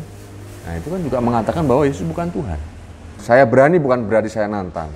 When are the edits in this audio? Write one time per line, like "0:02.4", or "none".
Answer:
0:03.1